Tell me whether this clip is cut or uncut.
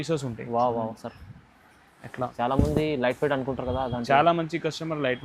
cut